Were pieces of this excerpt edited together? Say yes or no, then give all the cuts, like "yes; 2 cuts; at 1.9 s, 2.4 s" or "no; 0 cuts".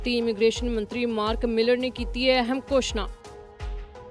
yes; 1 cut; at 3.1 s